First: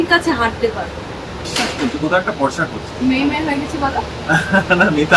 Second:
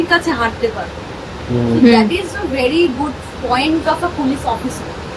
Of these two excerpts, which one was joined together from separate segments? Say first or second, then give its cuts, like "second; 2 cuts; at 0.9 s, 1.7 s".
first; 1 cut; at 1.5 s